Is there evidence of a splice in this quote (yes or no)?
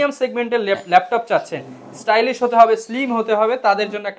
no